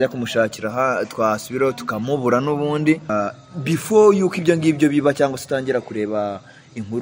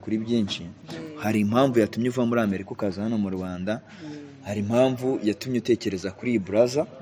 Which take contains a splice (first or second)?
first